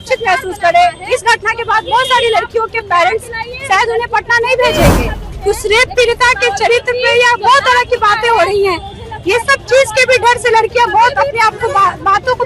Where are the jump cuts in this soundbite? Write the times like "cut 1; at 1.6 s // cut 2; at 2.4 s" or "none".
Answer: cut 1; at 5.3 s